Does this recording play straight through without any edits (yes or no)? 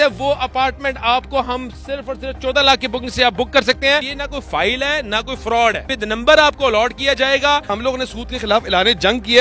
no